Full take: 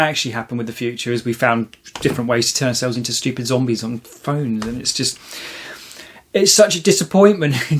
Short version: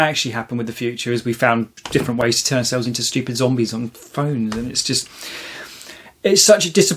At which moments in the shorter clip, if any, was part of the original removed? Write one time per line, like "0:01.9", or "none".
0:01.8